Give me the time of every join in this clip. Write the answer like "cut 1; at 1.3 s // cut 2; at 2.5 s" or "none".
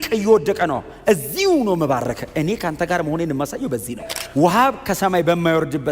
cut 1; at 4.1 s